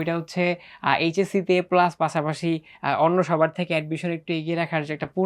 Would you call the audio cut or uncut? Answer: uncut